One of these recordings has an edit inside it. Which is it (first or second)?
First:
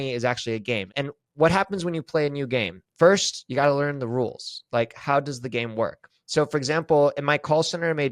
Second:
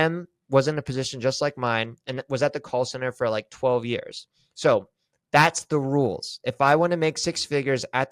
first